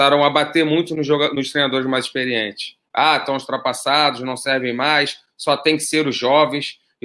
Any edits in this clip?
no; 0 cuts

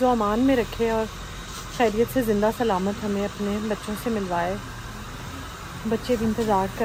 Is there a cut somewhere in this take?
no; 0 cuts

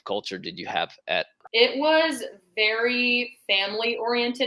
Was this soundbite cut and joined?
yes; 1 cut; at 1.4 s

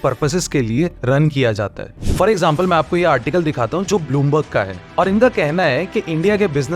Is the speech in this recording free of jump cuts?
no; 1 cut; at 1.9 s

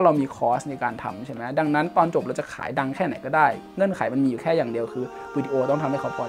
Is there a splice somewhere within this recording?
no; 0 cuts

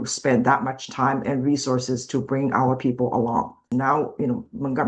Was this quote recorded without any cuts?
no; 1 cut; at 3.6 s

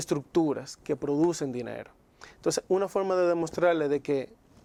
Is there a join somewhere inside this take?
no; 0 cuts

